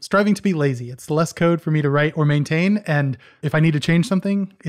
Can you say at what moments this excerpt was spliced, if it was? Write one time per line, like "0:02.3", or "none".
none